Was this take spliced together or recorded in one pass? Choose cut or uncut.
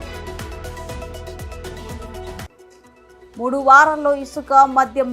cut